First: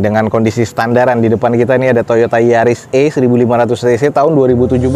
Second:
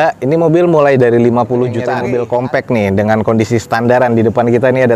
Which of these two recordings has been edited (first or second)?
second